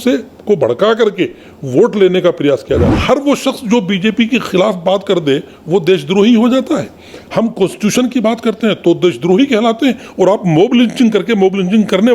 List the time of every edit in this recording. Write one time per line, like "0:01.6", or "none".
0:02.9